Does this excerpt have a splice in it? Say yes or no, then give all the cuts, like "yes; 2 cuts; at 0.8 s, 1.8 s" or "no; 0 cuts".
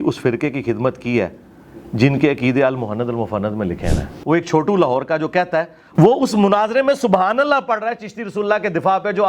yes; 2 cuts; at 4.1 s, 5.8 s